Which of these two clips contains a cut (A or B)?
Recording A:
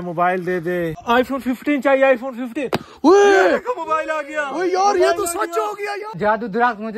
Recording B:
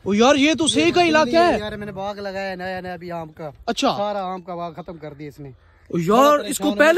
A